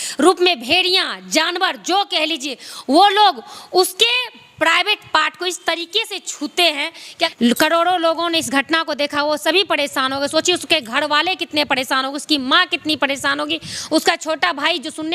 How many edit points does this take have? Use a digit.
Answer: 1